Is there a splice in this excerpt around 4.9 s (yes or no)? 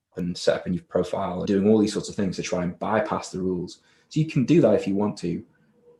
no